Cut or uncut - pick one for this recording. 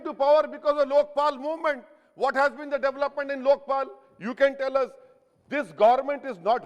uncut